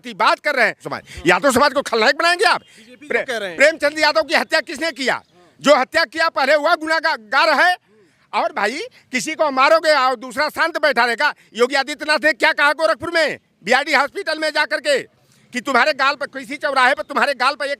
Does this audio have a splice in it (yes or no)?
yes